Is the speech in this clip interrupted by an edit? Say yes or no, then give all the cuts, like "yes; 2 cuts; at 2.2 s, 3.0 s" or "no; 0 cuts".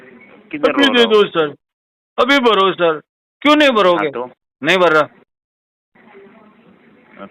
no; 0 cuts